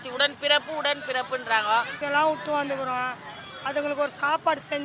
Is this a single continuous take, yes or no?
no